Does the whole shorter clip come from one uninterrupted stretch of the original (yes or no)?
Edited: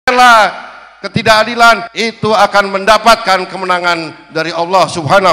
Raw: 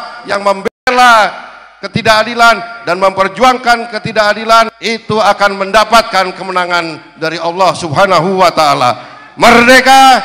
no